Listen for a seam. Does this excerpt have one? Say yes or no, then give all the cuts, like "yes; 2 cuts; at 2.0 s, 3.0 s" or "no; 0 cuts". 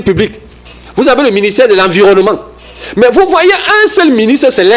no; 0 cuts